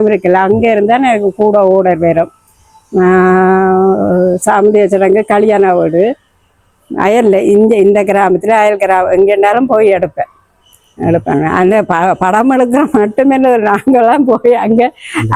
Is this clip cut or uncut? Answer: uncut